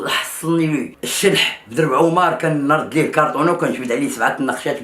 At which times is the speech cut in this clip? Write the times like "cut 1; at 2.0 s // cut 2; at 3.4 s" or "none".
cut 1; at 1.0 s